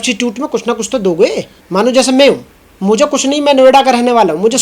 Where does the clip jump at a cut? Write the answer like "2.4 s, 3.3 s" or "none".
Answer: 1.5 s